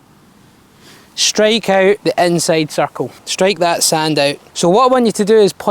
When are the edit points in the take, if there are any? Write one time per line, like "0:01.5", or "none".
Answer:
0:04.4